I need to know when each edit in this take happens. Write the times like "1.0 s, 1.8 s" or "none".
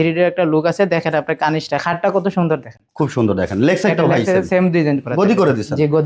none